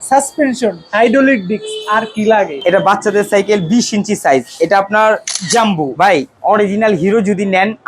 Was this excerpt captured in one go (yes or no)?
no